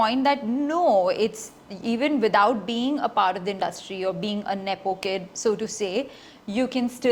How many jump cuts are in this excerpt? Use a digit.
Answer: 0